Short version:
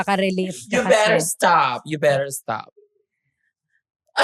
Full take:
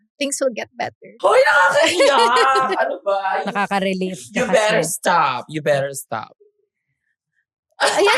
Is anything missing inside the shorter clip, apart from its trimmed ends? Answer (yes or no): no